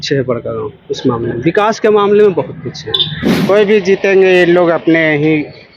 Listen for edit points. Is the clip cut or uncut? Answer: cut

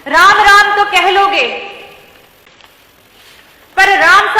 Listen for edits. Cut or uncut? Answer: uncut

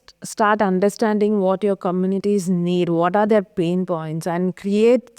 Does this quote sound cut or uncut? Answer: uncut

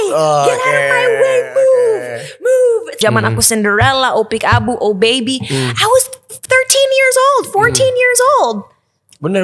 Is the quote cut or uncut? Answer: cut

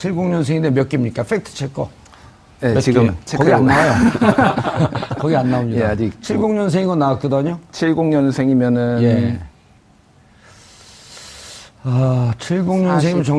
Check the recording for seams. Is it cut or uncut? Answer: cut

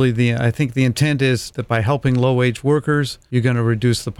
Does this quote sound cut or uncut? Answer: cut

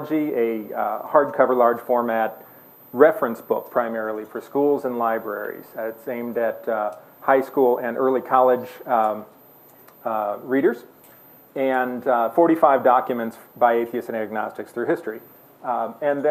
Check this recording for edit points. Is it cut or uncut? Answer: cut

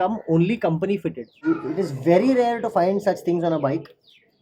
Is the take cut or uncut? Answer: cut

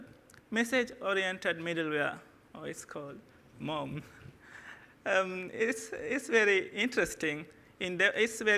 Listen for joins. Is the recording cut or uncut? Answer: cut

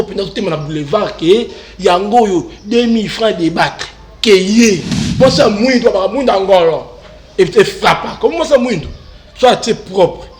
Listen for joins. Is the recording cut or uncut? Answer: cut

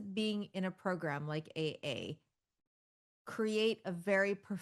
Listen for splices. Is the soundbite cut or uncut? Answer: uncut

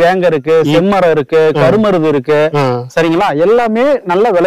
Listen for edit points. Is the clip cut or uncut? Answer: uncut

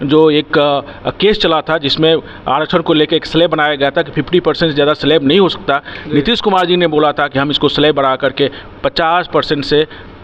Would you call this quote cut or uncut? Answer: uncut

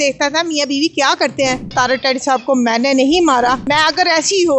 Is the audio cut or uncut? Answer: cut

